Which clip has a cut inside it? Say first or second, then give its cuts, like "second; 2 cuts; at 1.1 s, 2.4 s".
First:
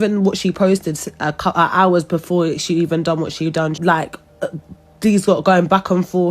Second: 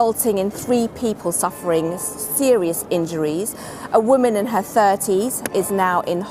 first; 1 cut; at 3.8 s